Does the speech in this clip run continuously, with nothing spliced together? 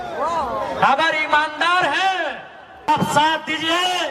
no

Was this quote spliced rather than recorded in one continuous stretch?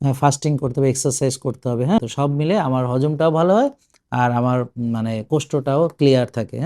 yes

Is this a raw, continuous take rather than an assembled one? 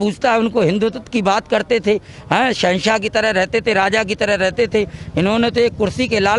yes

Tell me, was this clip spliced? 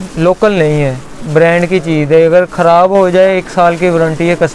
no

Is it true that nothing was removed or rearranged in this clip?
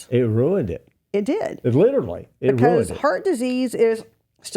yes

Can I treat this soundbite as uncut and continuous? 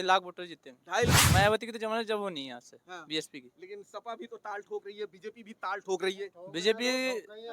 no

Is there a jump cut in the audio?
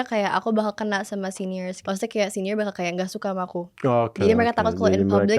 yes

